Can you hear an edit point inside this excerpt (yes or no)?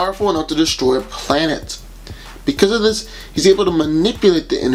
no